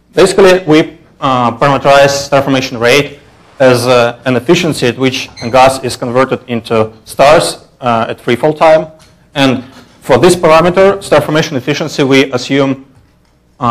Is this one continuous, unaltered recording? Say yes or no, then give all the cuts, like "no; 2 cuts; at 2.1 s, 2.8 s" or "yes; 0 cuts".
no; 1 cut; at 4.4 s